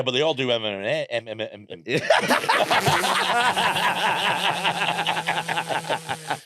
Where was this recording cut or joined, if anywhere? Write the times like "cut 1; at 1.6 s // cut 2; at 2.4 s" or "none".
none